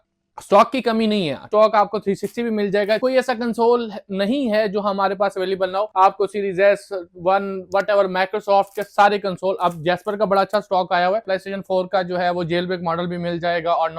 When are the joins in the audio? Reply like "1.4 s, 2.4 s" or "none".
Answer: 1.5 s, 3.0 s, 5.9 s, 11.3 s